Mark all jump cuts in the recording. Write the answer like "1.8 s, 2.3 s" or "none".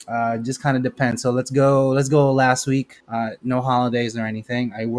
3.0 s